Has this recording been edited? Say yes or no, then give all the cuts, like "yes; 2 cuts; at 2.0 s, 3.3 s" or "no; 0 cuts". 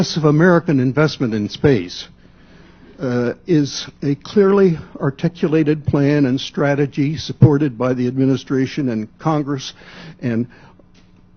no; 0 cuts